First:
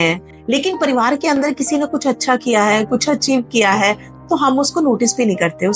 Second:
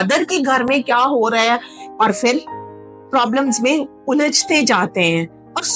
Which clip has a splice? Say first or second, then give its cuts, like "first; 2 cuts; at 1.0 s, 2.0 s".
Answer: second; 1 cut; at 1.8 s